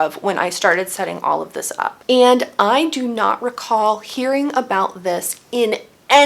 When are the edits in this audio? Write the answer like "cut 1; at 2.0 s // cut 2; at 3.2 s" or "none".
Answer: cut 1; at 2.0 s